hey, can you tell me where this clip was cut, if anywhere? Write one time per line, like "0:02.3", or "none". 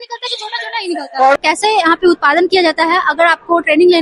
0:01.3

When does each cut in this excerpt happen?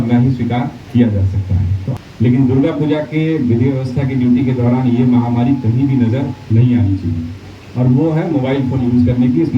0:01.8

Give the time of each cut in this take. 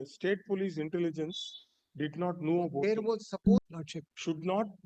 0:03.6

